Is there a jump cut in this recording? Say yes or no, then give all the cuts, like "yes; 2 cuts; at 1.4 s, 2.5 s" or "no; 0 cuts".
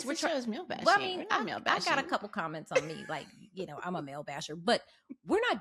no; 0 cuts